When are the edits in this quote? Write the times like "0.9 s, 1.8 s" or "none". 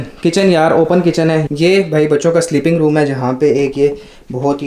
1.5 s